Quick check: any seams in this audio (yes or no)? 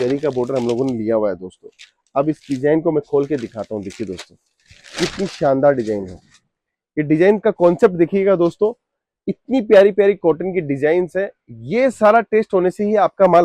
no